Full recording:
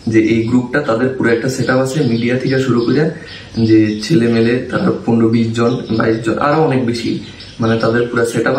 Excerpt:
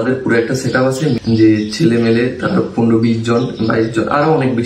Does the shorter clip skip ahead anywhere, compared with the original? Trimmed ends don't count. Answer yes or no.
yes